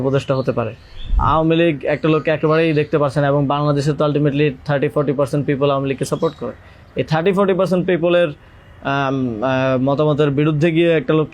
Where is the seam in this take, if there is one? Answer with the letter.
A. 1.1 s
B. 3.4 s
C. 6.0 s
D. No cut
A